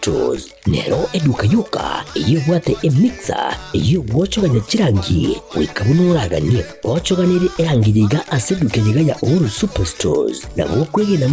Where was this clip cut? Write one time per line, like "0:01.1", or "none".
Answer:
0:10.3